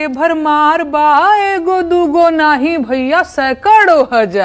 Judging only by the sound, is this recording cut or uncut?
uncut